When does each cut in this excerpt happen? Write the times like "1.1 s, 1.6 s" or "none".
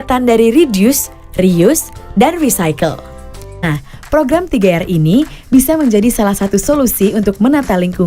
3.6 s

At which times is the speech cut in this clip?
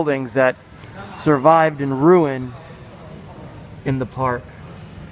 1.2 s

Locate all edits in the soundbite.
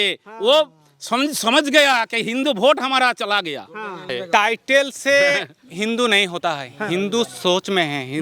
4.1 s

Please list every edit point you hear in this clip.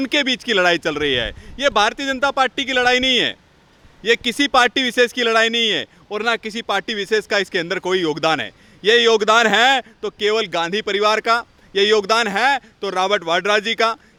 none

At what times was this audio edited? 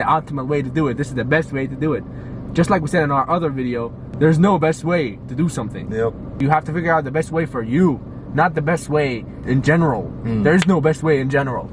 4.0 s, 6.3 s, 9.3 s

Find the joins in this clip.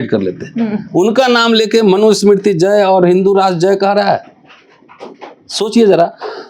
none

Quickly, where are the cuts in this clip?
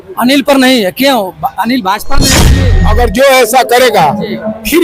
2.4 s

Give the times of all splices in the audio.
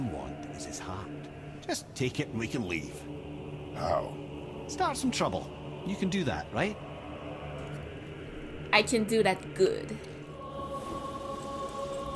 10.4 s

